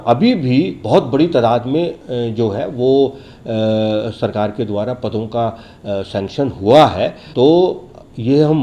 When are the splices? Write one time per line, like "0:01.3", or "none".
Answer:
none